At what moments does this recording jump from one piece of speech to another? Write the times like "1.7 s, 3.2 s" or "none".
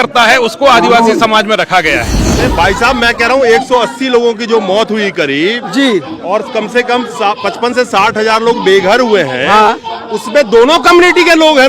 2.4 s